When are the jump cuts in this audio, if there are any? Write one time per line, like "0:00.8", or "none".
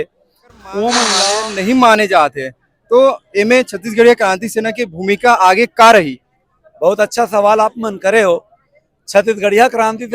0:01.3